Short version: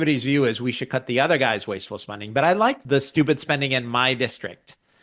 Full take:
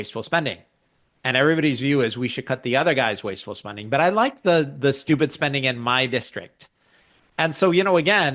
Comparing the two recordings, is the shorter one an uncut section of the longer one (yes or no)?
no